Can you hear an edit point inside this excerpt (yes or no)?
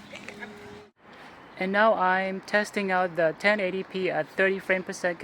yes